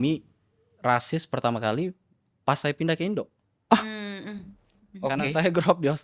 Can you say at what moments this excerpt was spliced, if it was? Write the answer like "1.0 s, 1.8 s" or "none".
none